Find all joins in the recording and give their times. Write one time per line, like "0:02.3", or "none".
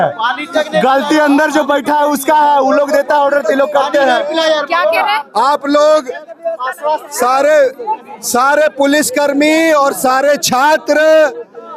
none